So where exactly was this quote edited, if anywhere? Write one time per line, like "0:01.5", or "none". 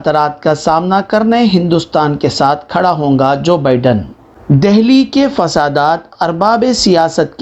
0:04.3